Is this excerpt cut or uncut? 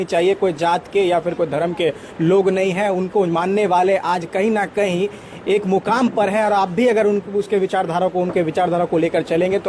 uncut